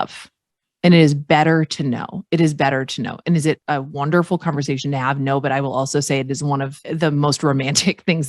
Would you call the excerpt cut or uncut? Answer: cut